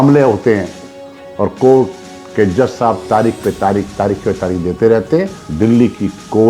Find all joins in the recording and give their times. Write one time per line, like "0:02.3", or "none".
0:05.4